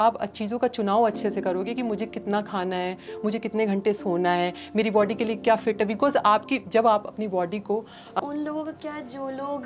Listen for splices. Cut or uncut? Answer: cut